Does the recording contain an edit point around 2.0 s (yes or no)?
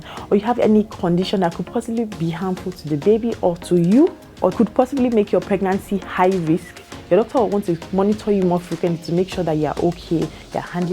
no